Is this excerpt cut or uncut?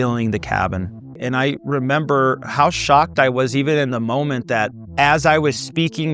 uncut